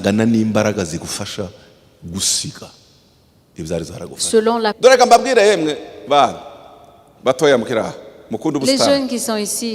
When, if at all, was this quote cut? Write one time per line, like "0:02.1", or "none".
0:04.8